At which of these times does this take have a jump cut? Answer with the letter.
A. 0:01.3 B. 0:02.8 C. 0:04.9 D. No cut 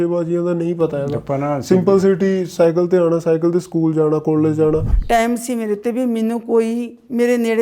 C